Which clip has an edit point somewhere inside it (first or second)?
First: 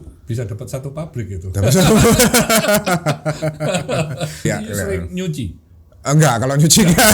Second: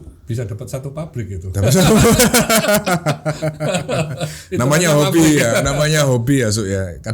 first